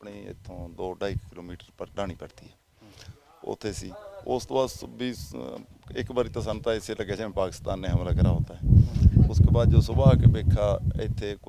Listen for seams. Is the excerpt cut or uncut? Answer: uncut